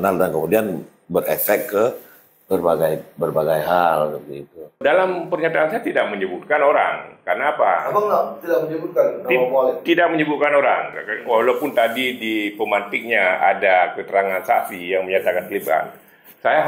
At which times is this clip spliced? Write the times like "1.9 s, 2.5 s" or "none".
4.8 s